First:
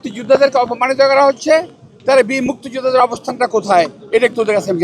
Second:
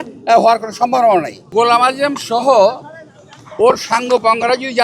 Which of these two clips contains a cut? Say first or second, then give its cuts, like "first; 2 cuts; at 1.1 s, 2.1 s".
second; 1 cut; at 1.4 s